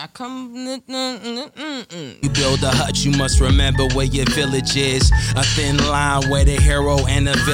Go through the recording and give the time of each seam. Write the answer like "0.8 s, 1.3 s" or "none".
2.2 s

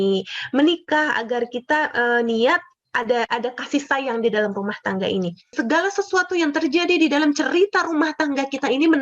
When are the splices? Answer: 2.8 s, 5.5 s

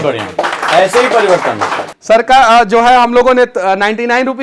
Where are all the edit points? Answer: 1.9 s

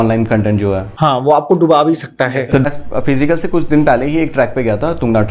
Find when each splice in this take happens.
2.6 s

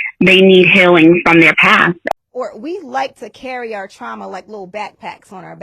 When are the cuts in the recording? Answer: 2.1 s

